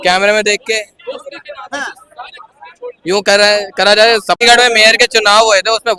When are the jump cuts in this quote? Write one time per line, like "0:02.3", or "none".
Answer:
0:04.4